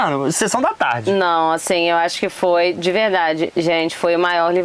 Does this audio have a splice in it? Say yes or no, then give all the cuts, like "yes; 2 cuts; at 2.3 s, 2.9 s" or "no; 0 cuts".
no; 0 cuts